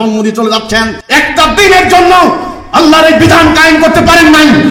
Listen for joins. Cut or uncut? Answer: cut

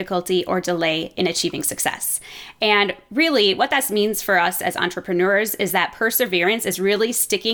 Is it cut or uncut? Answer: uncut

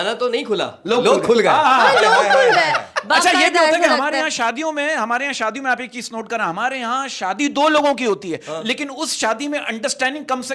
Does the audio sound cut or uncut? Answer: uncut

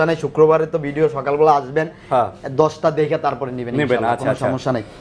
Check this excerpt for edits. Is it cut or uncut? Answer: uncut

